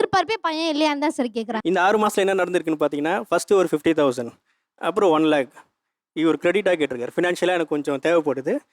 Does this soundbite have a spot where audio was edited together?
yes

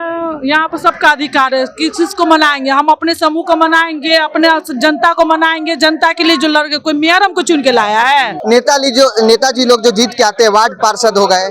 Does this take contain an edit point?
yes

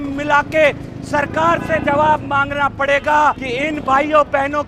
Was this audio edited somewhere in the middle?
yes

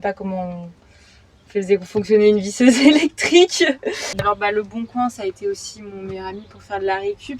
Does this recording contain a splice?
yes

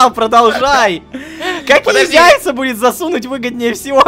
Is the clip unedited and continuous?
yes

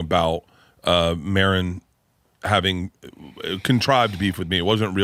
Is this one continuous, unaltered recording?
yes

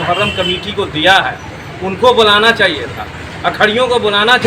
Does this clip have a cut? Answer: no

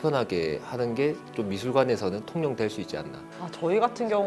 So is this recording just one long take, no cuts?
yes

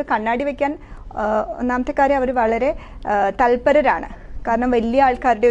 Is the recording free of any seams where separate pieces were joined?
yes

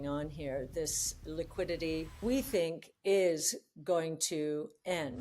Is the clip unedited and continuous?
no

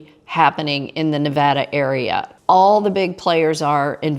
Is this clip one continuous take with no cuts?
no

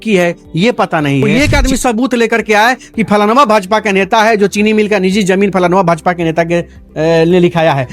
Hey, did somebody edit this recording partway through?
yes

